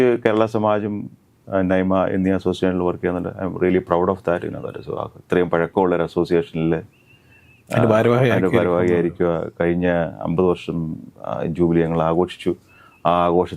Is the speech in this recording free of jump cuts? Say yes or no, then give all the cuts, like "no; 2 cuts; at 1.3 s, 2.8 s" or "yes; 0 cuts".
yes; 0 cuts